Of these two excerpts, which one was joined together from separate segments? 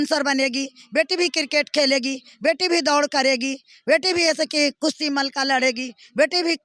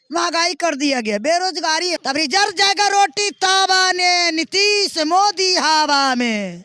second; 1 cut; at 2.0 s

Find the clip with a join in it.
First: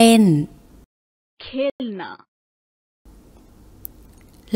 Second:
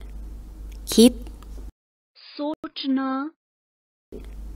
second; 1 cut; at 2.6 s

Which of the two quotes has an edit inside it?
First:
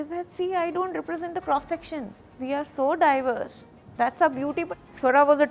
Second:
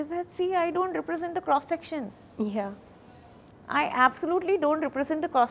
first; 2 cuts; at 2.2 s, 4.7 s

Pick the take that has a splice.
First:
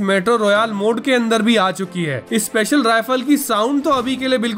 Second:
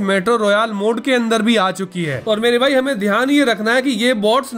second; 1 cut; at 2.1 s

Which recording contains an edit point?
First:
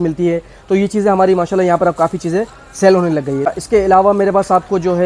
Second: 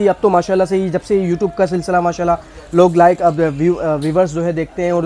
first; 1 cut; at 3.5 s

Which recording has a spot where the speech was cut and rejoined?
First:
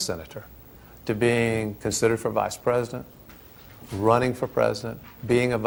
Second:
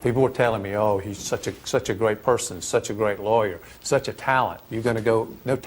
second; 1 cut; at 0.9 s

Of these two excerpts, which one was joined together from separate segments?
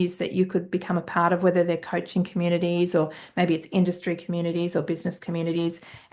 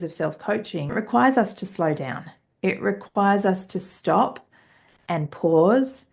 second; 1 cut; at 0.9 s

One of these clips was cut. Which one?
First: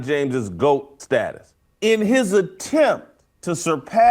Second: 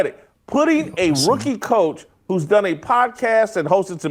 first; 1 cut; at 1.3 s

